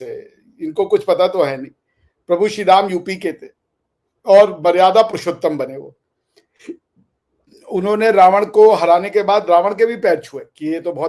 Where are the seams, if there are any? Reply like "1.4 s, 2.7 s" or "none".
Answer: none